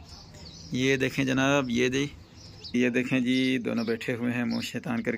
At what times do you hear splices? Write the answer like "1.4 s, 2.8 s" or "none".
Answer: 2.7 s